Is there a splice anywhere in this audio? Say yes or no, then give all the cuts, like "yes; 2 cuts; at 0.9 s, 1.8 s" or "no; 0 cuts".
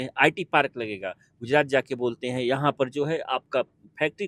no; 0 cuts